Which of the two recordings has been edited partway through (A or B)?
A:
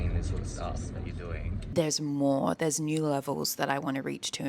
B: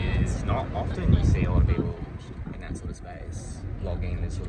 A